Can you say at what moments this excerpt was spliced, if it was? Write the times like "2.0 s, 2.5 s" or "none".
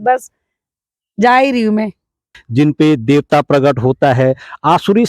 2.3 s